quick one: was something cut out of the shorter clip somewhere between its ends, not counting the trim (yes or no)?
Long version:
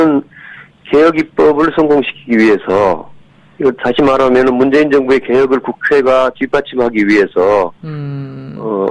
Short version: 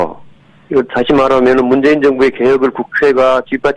no